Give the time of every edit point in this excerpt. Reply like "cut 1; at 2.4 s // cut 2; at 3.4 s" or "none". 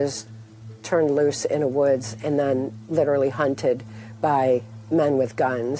none

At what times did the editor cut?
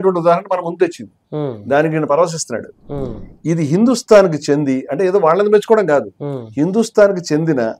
none

